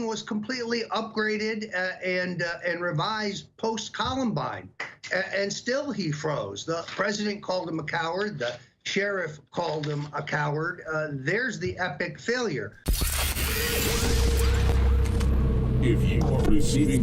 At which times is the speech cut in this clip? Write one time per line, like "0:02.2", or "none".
0:12.8